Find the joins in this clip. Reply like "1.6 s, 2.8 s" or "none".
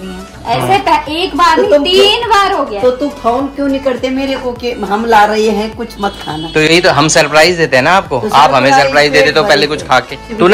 none